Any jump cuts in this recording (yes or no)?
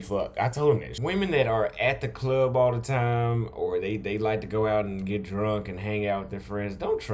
yes